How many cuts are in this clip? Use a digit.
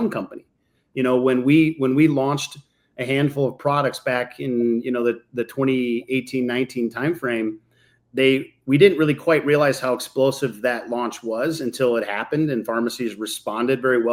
0